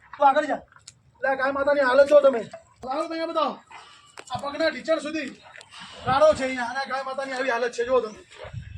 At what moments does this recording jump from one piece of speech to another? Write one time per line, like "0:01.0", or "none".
0:02.8

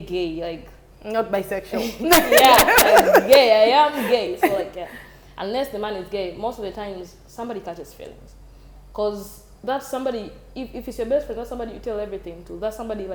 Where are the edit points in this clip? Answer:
none

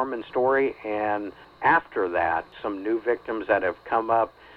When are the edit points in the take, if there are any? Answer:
0:01.5
0:02.5

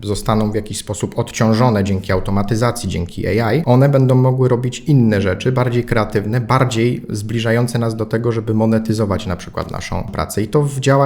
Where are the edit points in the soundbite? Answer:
0:03.6
0:10.1

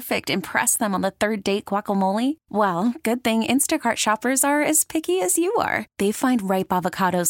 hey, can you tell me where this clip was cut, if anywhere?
none

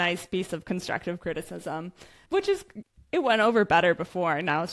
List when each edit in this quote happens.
none

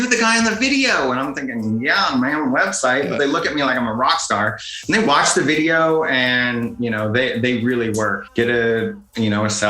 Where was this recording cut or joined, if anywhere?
0:08.2

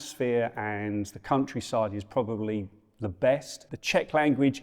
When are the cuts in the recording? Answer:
0:03.6

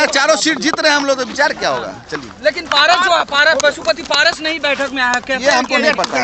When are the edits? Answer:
none

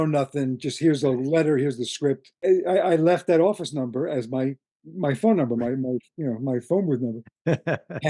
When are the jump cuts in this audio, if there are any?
0:02.3

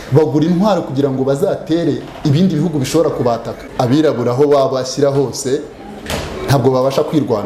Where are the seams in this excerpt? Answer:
0:03.6

